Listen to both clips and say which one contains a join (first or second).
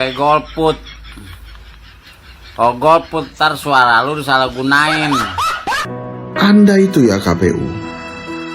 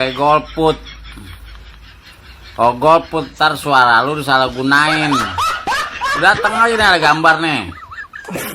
first